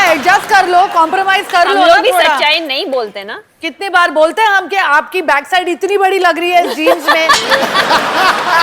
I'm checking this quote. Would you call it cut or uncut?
uncut